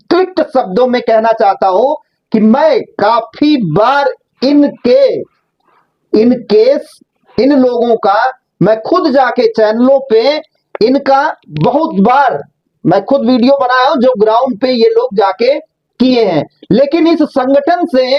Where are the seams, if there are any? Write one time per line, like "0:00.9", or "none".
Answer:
none

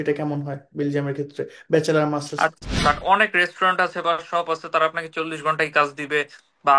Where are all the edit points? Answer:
0:02.7

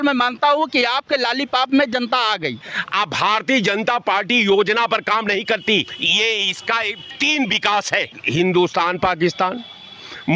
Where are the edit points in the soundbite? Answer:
0:02.7
0:06.0
0:07.0
0:08.2

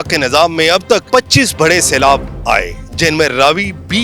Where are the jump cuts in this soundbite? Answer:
0:01.0

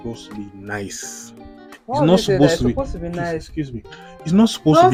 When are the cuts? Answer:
none

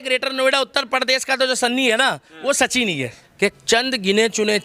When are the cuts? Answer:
0:03.2

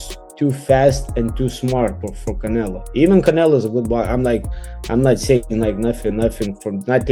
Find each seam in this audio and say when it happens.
none

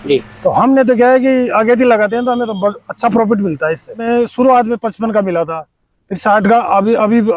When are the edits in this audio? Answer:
0:04.0

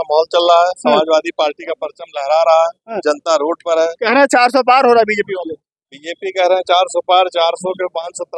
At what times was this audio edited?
none

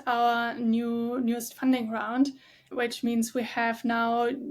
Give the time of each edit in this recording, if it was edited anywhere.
none

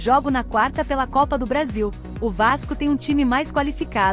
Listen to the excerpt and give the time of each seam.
none

